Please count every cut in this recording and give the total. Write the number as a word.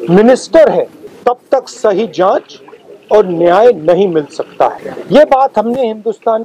two